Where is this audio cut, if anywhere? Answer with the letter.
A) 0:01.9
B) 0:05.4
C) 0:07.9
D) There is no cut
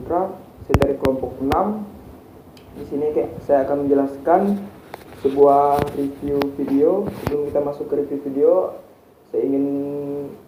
D